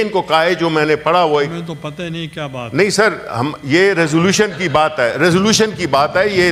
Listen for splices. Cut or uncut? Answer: uncut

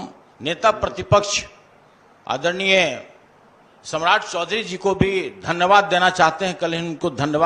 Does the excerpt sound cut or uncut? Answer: uncut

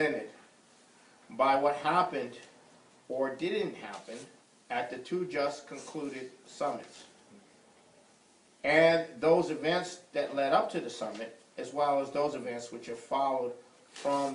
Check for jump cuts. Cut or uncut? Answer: uncut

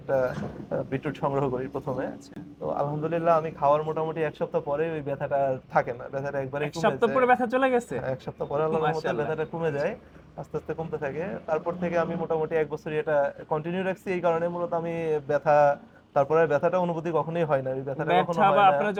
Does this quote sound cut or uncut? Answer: uncut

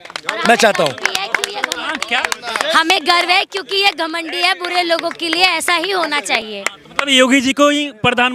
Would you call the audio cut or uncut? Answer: uncut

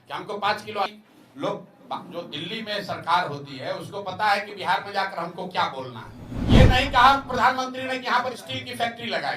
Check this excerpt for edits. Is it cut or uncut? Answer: cut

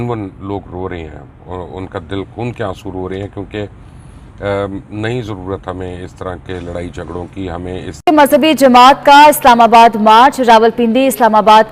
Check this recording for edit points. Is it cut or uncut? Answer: cut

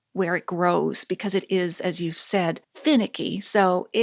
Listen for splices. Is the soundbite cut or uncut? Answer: uncut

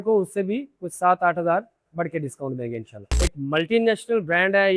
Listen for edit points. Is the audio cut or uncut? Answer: cut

